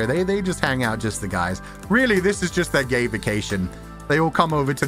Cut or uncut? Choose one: uncut